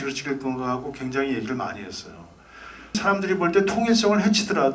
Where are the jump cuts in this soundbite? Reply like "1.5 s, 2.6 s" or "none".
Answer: 3.0 s